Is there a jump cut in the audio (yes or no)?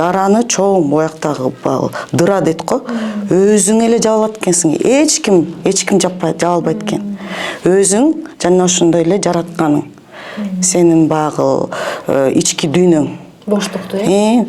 no